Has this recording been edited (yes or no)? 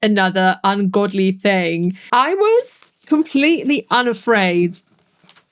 yes